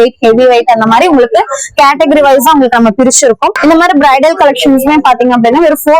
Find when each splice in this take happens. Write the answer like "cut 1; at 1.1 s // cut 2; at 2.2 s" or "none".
cut 1; at 3.6 s